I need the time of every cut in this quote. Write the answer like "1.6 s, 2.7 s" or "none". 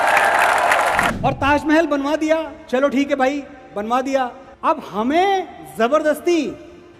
1.1 s, 4.5 s